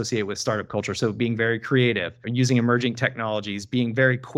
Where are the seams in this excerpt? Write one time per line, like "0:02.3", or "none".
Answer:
0:02.1